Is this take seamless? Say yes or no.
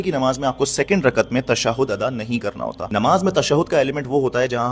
yes